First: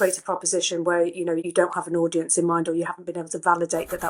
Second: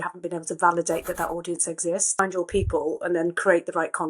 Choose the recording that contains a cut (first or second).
second